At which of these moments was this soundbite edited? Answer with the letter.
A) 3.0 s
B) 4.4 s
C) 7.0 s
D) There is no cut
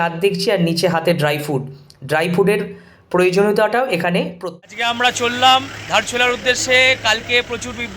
B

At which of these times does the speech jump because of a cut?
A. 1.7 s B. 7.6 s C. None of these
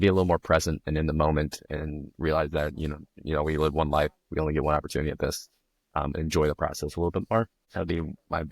B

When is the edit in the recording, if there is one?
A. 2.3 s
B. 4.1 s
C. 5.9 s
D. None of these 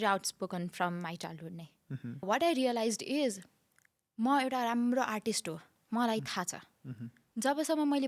A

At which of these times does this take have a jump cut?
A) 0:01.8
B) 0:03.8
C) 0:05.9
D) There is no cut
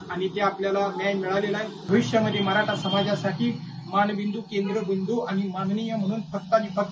A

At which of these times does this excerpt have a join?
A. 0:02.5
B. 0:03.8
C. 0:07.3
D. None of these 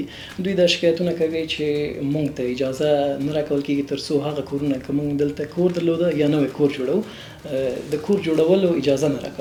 D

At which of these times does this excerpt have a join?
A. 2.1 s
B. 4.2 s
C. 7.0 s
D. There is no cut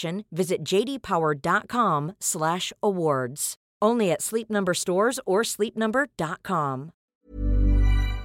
C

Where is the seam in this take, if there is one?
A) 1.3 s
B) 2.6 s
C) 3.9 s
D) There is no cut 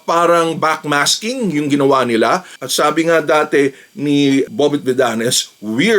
B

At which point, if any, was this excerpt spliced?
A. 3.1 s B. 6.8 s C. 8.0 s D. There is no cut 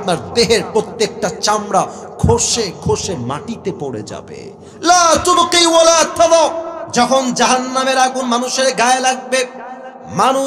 B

